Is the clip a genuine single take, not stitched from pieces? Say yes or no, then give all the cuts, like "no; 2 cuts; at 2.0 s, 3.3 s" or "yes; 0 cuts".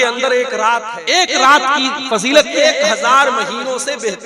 no; 2 cuts; at 1.0 s, 2.6 s